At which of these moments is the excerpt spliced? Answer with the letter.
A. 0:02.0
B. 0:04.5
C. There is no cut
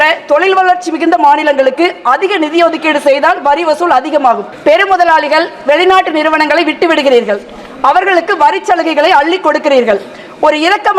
B